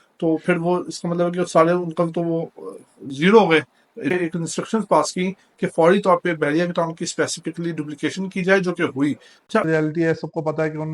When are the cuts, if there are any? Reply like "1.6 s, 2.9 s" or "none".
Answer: 4.1 s, 9.6 s